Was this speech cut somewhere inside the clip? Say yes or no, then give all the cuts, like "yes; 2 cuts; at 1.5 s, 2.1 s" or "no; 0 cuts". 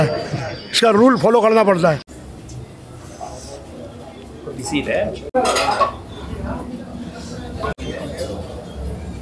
no; 0 cuts